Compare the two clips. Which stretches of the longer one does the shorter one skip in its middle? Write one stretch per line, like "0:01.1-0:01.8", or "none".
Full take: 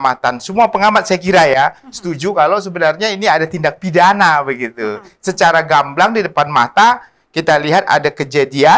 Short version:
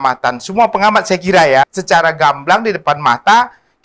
0:01.7-0:05.2